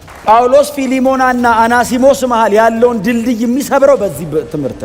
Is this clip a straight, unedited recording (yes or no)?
yes